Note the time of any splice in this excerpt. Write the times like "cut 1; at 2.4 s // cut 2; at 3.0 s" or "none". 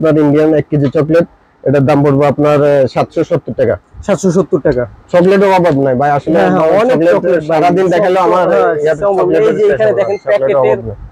none